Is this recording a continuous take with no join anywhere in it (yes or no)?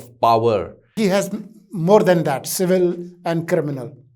no